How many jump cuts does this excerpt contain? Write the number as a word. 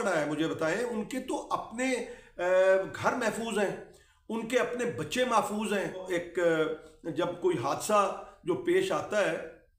one